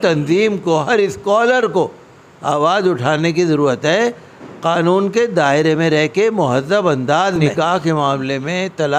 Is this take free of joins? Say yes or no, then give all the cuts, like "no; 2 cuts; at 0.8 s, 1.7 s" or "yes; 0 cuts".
no; 1 cut; at 7.4 s